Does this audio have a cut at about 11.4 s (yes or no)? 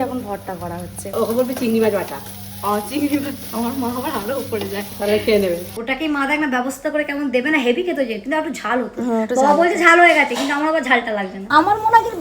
yes